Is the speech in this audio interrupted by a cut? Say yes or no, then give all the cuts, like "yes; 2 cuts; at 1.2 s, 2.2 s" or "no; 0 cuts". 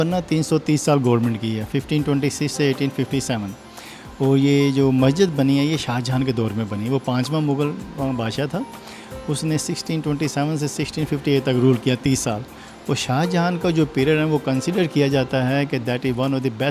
no; 0 cuts